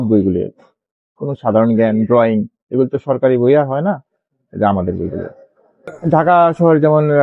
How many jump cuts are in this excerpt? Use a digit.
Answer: 1